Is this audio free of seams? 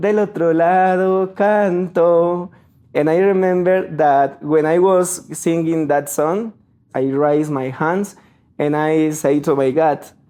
yes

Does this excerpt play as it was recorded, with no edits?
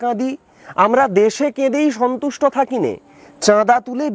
yes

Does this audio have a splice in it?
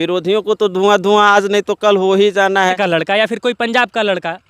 yes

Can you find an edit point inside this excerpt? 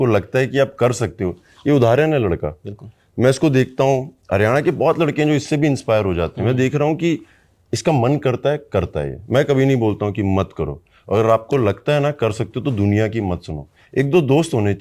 no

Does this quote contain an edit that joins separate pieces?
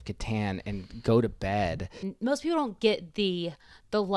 yes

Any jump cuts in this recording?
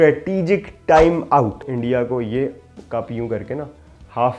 yes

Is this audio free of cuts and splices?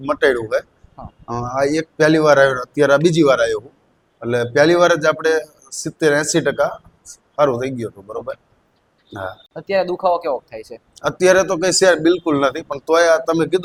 yes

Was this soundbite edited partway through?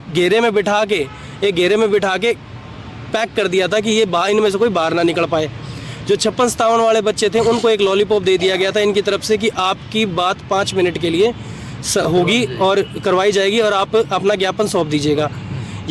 no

